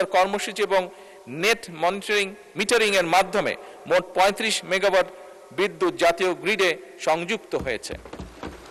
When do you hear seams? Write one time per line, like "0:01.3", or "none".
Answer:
none